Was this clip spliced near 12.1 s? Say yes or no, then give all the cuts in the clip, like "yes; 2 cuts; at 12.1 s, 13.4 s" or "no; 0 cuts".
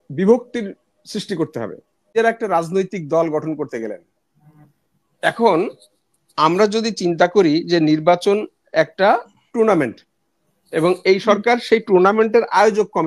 no; 1 cut; at 2.1 s